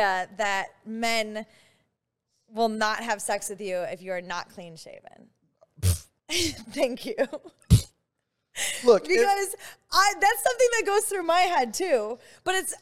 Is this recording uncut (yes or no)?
no